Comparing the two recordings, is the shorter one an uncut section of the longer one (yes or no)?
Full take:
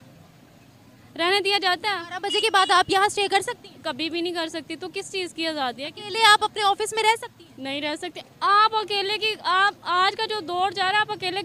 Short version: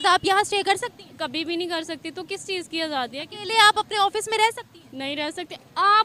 yes